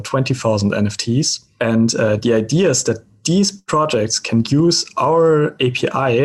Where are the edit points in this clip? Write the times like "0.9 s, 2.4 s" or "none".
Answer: 1.4 s, 3.1 s